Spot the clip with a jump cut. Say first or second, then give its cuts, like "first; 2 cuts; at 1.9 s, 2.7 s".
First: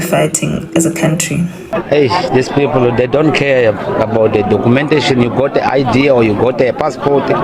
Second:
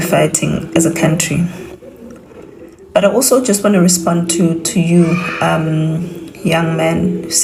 first; 1 cut; at 1.6 s